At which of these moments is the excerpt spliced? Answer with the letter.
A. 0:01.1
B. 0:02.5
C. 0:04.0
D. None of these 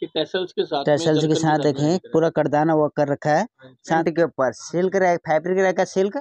C